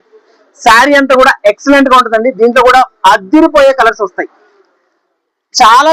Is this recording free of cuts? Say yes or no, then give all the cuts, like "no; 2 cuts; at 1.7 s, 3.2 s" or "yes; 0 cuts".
yes; 0 cuts